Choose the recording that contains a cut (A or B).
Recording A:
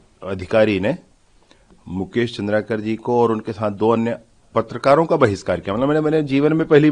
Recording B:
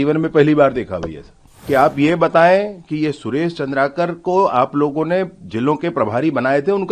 B